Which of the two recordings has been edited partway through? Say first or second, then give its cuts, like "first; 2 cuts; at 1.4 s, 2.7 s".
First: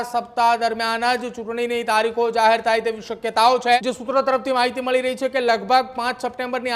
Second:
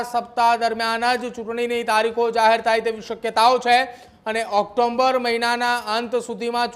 first; 1 cut; at 3.8 s